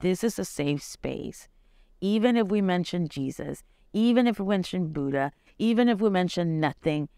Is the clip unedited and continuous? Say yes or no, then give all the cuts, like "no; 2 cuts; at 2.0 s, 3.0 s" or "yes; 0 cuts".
yes; 0 cuts